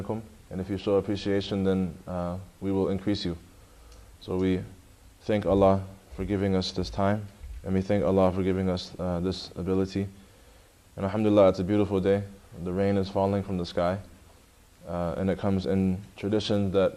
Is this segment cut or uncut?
cut